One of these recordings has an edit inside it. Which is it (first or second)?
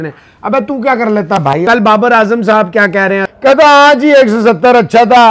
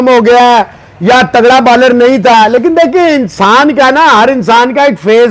first